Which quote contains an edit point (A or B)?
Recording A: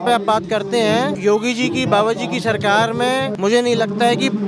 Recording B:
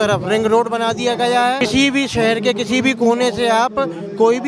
A